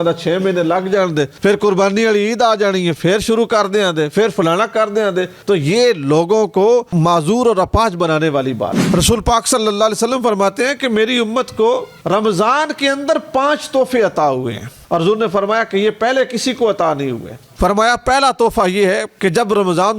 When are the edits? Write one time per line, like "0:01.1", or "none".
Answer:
0:08.8
0:14.7
0:17.5